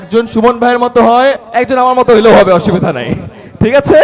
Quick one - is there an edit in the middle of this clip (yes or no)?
yes